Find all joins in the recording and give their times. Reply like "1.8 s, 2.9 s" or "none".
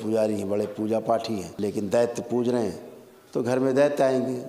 1.5 s